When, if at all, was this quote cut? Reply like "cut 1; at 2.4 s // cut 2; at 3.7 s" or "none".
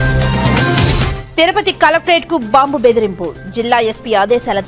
cut 1; at 1.1 s